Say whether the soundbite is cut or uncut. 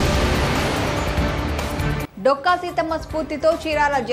cut